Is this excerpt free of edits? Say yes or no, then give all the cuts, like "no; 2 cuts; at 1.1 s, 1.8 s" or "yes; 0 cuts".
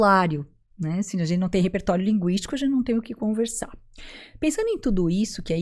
yes; 0 cuts